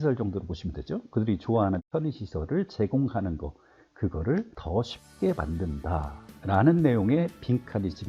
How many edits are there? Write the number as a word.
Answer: zero